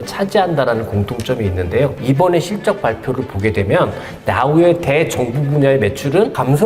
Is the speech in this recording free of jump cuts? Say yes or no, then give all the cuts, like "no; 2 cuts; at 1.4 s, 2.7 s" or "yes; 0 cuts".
no; 1 cut; at 2.0 s